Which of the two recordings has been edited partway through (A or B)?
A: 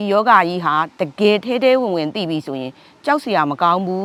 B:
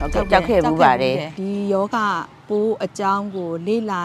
B